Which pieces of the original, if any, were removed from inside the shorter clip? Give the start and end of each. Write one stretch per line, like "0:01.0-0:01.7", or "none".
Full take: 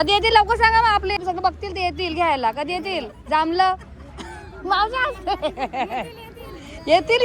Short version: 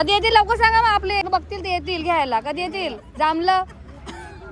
0:01.2-0:01.3

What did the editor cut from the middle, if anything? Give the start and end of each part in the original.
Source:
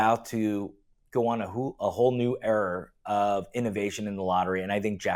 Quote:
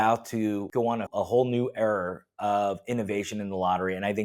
0:01.1-0:01.7

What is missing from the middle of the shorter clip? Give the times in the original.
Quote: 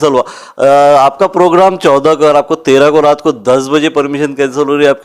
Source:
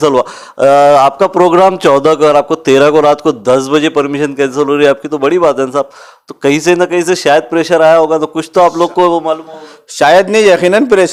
none

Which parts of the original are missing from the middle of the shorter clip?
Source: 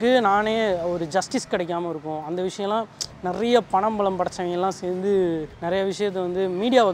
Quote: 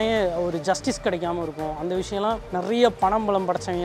0:02.9-0:03.2

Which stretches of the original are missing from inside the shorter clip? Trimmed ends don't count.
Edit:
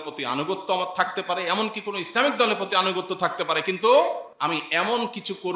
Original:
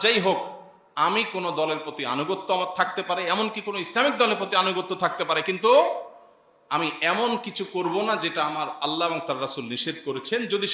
0:06.1-0:06.6

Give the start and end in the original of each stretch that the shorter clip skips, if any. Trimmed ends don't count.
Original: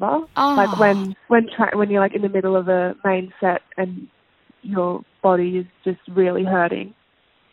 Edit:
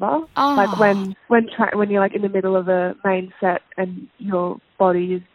0:04.1-0:04.5

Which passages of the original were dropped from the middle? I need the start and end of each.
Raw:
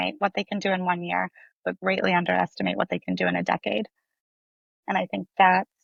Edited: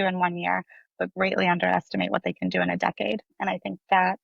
0:03.9-0:04.8

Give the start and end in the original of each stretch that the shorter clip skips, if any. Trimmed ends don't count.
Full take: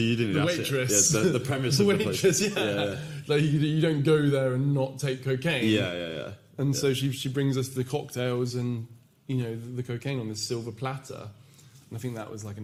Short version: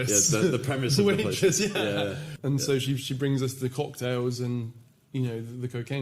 0:03.1-0:06.4

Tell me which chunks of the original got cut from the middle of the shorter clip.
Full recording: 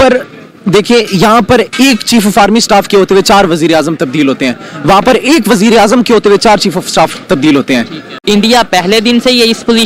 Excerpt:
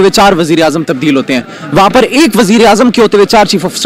none

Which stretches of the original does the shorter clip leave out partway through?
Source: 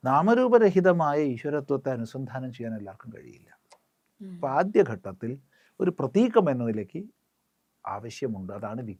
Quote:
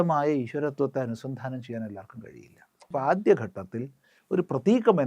0:03.8-0:04.3

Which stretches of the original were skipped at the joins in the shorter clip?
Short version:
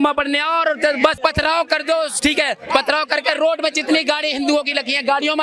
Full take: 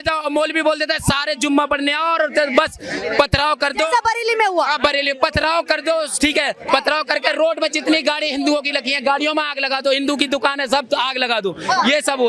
0:02.7-0:05.1

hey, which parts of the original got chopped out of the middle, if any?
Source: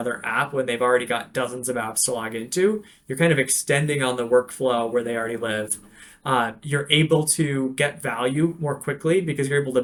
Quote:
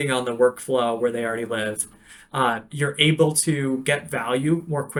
none

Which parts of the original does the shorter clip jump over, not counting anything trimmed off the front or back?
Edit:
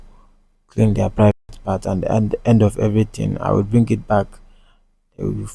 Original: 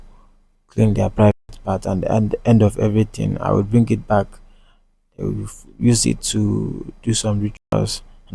none

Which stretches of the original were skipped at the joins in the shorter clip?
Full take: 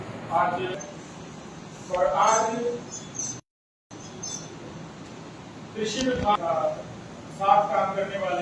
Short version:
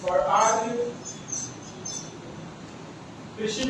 0:03.4-0:03.9

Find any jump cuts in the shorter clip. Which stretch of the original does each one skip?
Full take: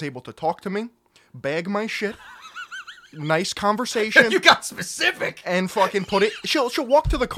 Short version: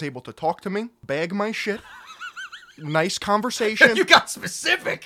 0:01.0-0:01.3

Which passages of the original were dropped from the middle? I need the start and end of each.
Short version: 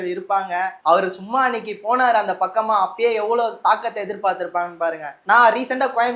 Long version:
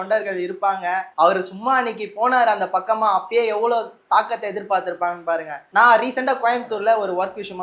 0:03.9-0:04.0

